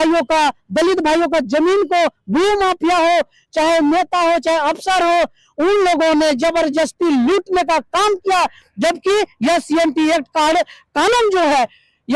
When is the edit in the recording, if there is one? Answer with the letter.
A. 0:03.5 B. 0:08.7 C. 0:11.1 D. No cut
D